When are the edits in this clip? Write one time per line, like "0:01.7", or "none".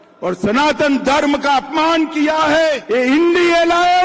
0:02.8